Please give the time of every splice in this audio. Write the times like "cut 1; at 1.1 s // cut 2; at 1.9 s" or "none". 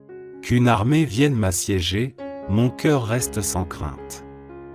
none